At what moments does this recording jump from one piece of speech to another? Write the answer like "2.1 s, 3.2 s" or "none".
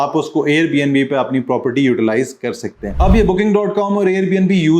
2.9 s